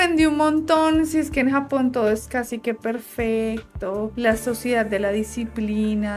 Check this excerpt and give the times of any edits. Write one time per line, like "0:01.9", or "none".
none